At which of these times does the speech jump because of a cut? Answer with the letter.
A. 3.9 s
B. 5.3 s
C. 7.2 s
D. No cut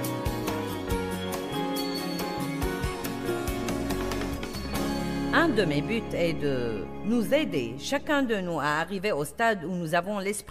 B